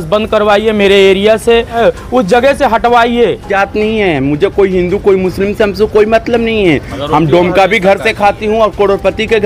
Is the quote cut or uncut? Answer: cut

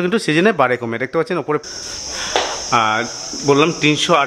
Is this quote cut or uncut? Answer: cut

